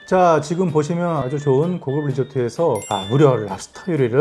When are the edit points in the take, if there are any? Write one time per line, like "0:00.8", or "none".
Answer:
0:01.2